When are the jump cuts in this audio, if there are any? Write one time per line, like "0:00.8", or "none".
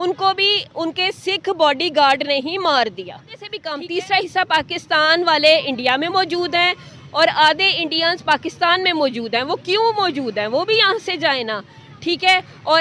0:03.6